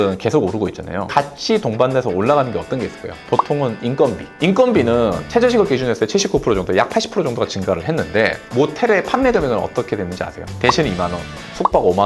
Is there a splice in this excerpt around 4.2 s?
yes; 2 cuts; at 1.1 s, 4.2 s

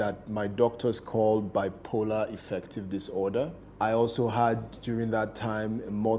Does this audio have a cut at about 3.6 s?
yes; 1 cut; at 3.6 s

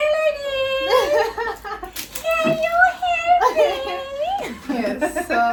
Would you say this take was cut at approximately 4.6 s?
no; 0 cuts

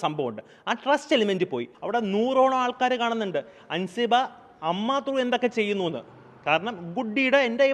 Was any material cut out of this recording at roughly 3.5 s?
no; 1 cut; at 1.7 s

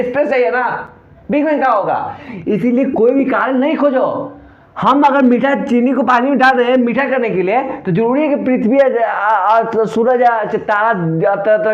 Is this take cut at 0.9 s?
no; 0 cuts

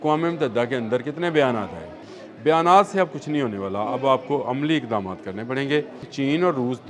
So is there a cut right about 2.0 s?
yes; 2 cuts; at 2.0 s, 6.1 s

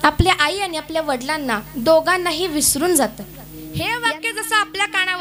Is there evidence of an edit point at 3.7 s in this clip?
yes; 1 cut; at 3.7 s

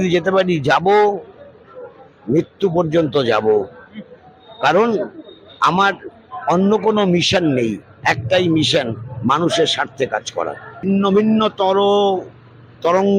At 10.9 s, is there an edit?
yes; 1 cut; at 10.9 s

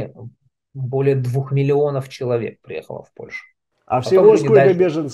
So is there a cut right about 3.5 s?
no; 0 cuts

